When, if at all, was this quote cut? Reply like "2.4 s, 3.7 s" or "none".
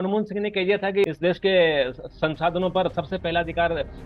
1.0 s